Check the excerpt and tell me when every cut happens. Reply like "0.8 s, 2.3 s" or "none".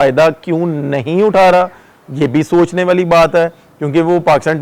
none